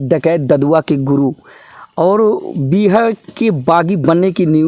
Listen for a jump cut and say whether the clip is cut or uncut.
uncut